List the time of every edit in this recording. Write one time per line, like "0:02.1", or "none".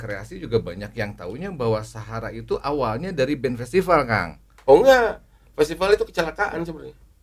none